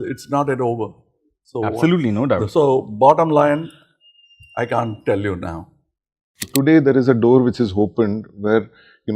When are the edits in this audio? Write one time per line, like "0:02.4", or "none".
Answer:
0:06.5